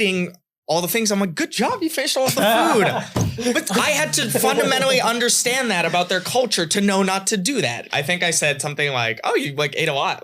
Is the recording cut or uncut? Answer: cut